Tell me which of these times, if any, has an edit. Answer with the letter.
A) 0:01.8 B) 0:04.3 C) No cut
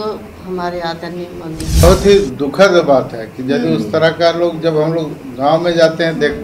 A